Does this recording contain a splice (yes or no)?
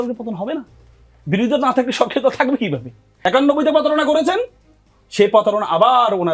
yes